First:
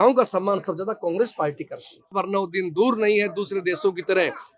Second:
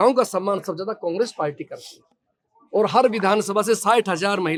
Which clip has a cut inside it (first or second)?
first